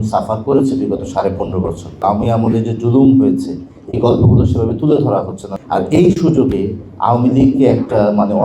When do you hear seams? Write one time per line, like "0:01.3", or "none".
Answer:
0:02.0
0:05.4